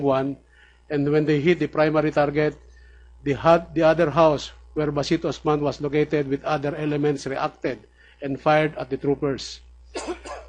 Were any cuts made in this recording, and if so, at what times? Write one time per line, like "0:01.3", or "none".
0:04.3